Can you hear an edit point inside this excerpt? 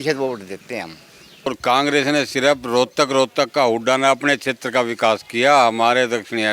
yes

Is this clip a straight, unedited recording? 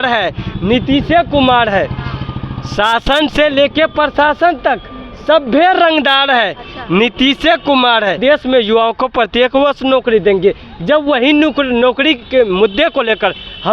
no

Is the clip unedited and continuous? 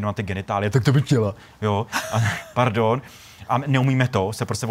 yes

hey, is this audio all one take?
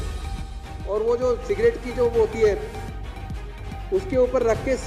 yes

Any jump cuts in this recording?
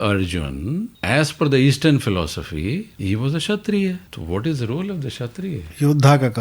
yes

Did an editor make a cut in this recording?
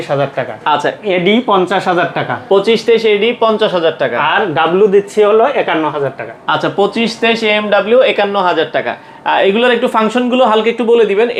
no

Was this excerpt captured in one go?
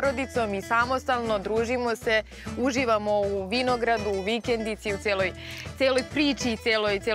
yes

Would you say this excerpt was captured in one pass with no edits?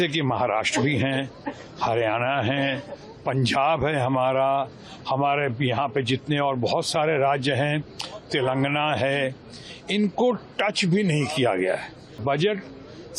no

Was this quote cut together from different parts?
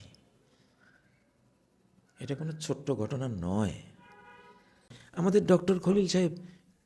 yes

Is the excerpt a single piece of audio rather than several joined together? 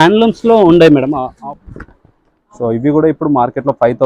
no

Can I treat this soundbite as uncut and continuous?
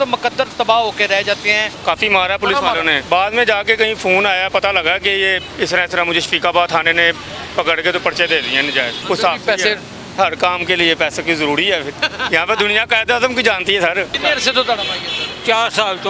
no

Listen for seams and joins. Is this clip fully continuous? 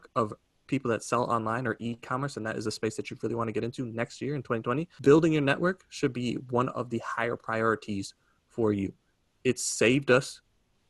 no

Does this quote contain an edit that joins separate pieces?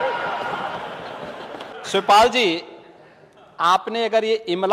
yes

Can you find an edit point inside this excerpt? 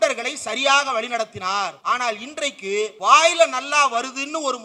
yes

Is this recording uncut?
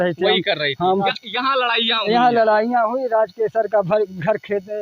no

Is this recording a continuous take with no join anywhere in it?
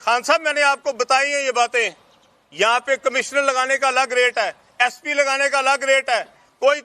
yes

